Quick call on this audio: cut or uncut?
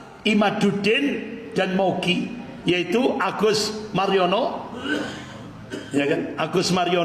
uncut